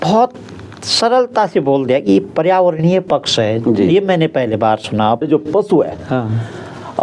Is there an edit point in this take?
yes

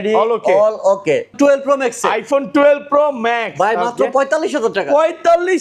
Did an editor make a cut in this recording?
yes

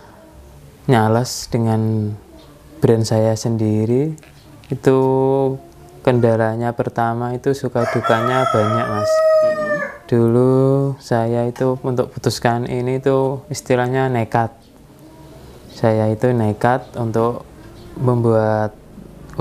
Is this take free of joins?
yes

